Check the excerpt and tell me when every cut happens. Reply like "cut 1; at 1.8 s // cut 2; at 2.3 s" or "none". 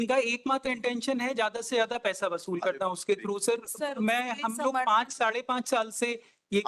none